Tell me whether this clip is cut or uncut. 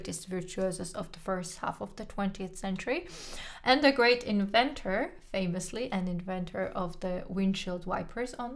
uncut